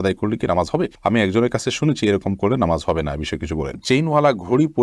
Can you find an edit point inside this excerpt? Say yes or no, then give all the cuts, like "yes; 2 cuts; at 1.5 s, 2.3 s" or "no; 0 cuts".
yes; 1 cut; at 3.7 s